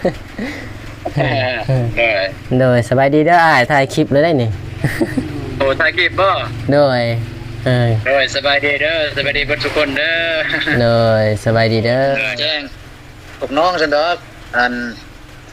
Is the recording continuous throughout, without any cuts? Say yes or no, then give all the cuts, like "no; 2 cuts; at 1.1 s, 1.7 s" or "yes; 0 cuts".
no; 1 cut; at 12.3 s